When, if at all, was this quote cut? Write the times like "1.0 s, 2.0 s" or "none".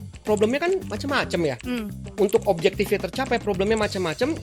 0.9 s, 2.0 s